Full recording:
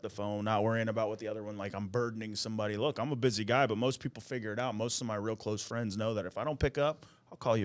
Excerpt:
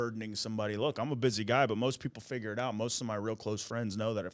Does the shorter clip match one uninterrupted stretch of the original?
yes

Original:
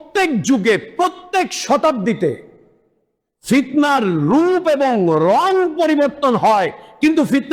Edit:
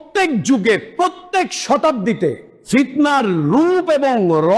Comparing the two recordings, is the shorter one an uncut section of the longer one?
no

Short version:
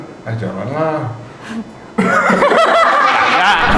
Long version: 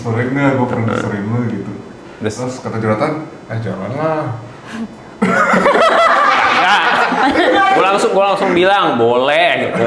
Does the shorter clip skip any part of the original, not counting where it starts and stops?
no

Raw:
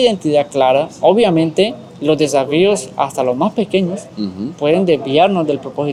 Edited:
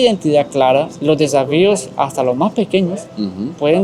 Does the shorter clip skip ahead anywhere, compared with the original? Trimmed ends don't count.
yes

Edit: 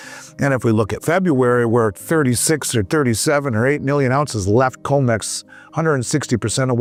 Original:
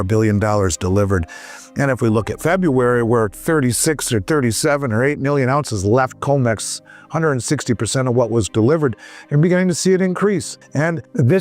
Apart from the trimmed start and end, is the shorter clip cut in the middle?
no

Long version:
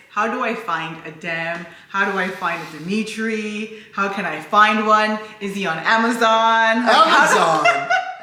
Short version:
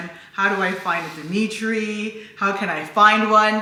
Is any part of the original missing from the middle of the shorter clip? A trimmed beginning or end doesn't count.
no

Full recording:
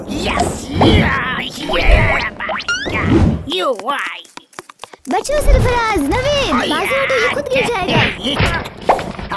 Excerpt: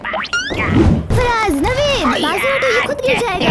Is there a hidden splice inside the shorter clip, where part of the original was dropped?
yes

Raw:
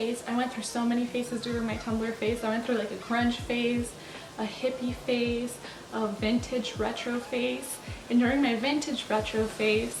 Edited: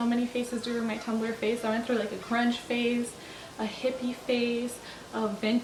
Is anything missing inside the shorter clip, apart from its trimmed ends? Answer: no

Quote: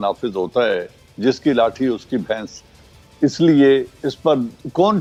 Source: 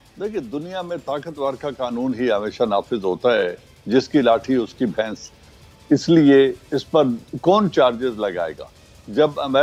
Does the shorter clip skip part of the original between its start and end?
no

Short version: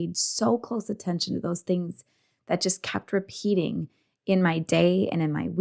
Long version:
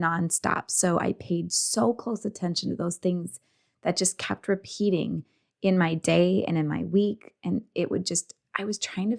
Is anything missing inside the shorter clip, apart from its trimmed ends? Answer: no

